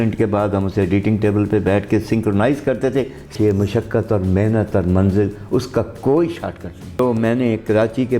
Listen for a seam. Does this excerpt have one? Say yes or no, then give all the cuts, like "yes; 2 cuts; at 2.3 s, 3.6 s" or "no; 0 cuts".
yes; 2 cuts; at 3.3 s, 7.0 s